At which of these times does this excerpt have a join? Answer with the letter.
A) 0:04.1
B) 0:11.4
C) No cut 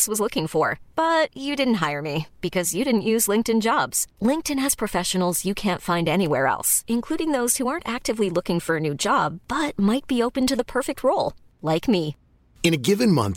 C